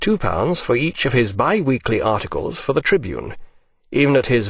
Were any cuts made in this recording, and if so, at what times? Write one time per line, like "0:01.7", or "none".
none